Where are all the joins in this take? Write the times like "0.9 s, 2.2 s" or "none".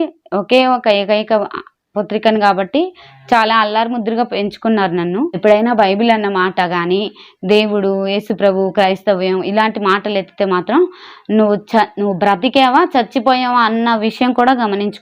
5.4 s